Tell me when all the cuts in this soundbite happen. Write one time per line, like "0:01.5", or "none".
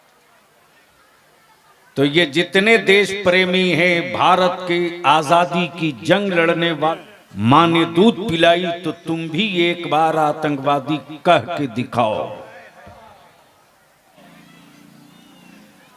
0:07.0
0:14.2